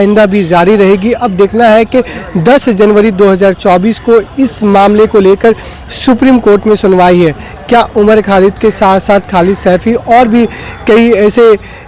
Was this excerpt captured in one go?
yes; 0 cuts

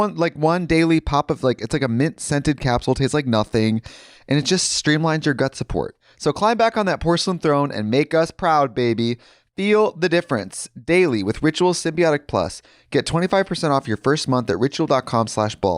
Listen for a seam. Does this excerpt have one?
no; 0 cuts

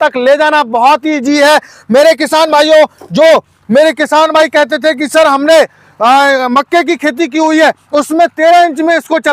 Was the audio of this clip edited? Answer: no; 0 cuts

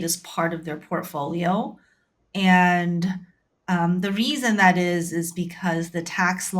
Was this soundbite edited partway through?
no; 0 cuts

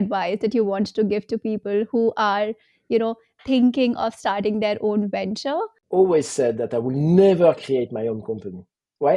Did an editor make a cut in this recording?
yes; 1 cut; at 5.8 s

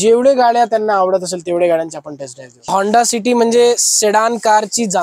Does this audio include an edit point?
yes; 1 cut; at 2.7 s

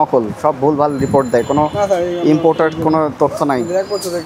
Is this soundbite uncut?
yes; 0 cuts

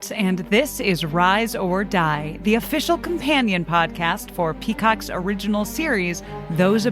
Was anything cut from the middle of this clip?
no; 0 cuts

